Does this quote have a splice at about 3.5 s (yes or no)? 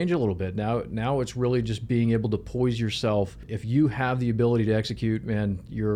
yes